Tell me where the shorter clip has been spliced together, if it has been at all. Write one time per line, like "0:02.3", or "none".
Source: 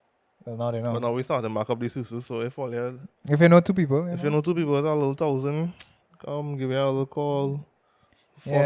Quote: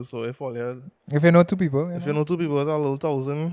none